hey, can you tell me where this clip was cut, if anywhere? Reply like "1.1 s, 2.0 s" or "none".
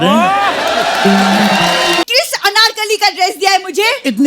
2.0 s